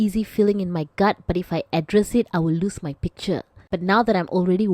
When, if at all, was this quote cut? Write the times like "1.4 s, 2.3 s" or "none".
3.7 s

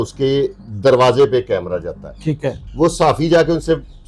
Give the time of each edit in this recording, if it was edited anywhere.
2.6 s

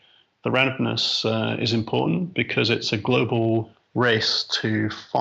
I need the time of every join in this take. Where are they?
3.8 s

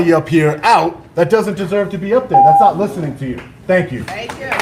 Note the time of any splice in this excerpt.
none

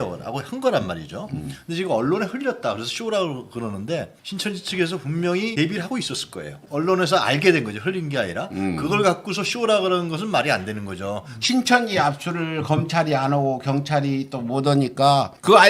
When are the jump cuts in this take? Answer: 4.2 s, 6.6 s, 11.4 s

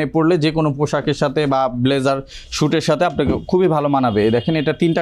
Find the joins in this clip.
none

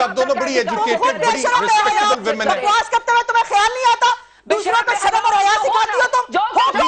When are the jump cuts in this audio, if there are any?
none

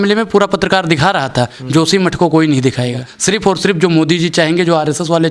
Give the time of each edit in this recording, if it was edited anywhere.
3.1 s

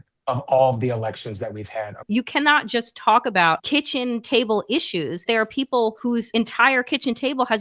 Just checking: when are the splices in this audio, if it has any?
2.0 s, 3.6 s, 5.2 s, 6.1 s

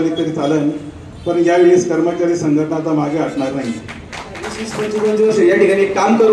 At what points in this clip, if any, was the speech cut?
4.8 s

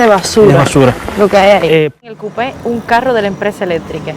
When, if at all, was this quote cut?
2.0 s

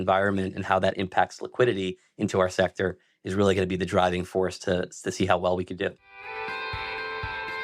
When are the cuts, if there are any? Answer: 6.1 s

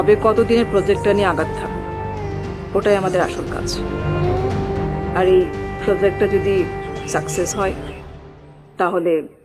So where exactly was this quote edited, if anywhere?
none

